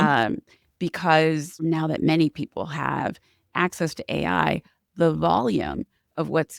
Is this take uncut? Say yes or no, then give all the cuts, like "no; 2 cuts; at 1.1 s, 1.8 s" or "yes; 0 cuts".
no; 1 cut; at 1.5 s